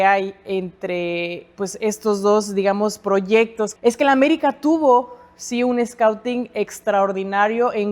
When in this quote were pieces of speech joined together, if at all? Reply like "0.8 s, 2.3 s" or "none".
3.7 s